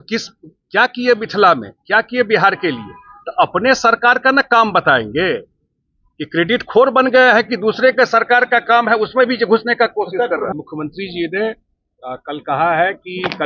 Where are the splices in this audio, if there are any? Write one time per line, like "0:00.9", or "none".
0:10.5